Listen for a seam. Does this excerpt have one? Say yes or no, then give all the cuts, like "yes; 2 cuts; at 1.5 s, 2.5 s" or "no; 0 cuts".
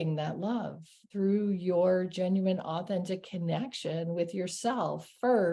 yes; 1 cut; at 1.1 s